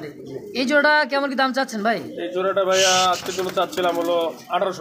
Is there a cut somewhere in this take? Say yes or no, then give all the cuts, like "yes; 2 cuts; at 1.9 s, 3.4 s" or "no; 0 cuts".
no; 0 cuts